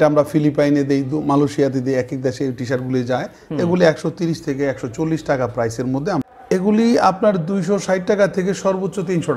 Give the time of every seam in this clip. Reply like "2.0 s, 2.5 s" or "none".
6.3 s